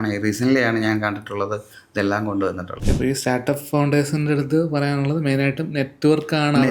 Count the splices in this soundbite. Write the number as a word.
one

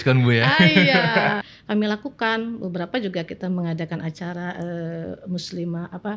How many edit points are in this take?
one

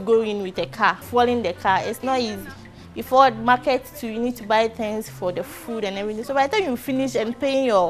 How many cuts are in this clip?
one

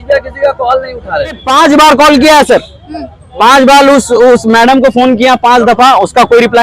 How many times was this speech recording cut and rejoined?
one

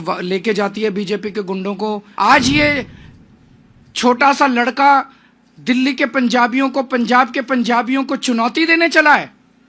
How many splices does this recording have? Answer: one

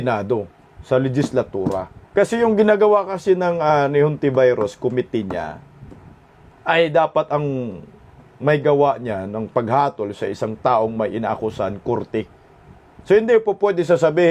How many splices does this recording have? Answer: one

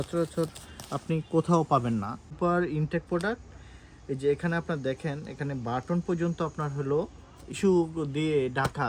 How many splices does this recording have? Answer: two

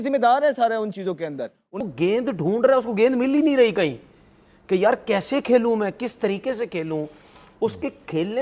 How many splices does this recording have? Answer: one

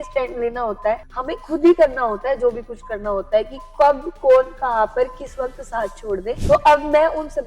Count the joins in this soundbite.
two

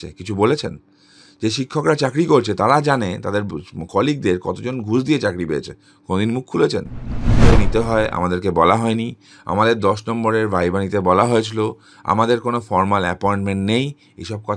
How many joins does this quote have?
one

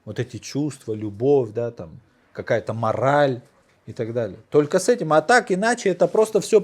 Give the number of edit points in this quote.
zero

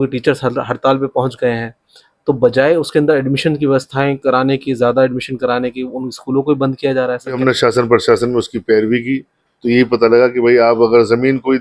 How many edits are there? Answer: one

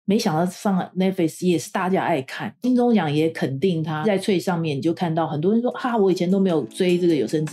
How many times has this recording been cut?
two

